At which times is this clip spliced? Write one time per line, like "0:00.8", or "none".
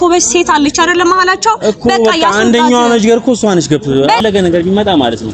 0:04.2